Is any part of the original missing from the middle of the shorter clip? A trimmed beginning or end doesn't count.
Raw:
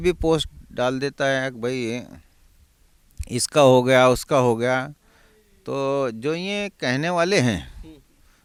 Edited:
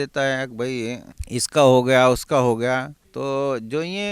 yes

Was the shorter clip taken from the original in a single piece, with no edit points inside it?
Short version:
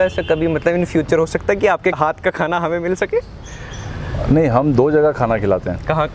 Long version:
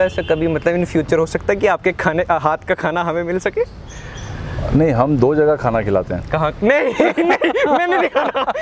no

